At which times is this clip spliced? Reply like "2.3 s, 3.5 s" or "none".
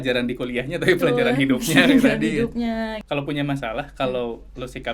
3.0 s